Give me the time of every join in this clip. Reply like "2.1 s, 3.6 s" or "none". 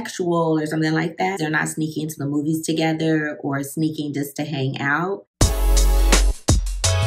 1.4 s, 5.3 s

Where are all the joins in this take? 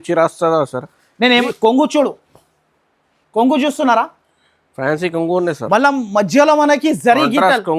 1.4 s

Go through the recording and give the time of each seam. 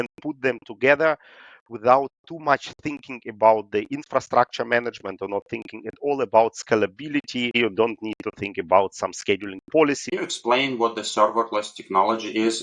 7.6 s, 10.1 s

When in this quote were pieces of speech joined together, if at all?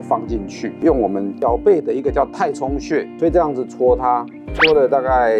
3.1 s

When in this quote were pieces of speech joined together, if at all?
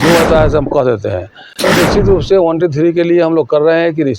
1.7 s

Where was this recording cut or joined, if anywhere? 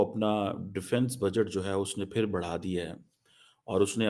none

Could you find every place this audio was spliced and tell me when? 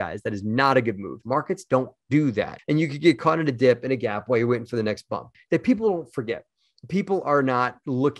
1.2 s, 2.6 s, 5.3 s

